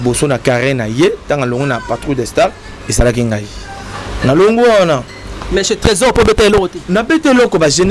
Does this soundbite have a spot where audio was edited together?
no; 0 cuts

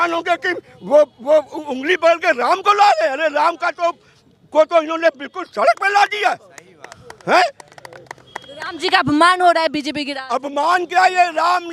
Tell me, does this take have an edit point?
no; 0 cuts

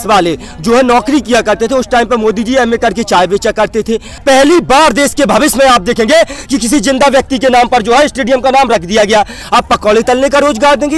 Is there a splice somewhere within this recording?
yes; 2 cuts; at 4.1 s, 9.4 s

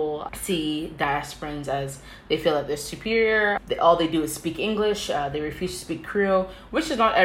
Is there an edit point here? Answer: no; 0 cuts

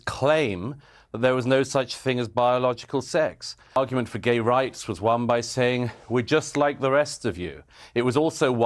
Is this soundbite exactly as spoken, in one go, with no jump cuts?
no; 1 cut; at 3.8 s

